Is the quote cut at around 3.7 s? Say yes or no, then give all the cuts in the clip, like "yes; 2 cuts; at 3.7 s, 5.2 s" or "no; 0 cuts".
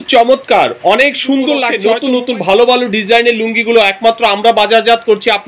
no; 1 cut; at 1.7 s